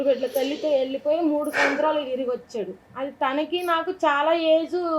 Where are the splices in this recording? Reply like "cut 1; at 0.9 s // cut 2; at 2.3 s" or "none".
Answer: cut 1; at 2.9 s